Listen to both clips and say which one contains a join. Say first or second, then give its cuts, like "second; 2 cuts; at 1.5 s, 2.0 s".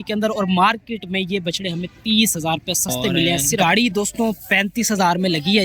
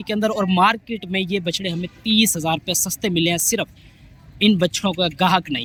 first; 1 cut; at 3.6 s